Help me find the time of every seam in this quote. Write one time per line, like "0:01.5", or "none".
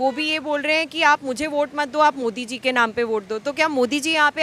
none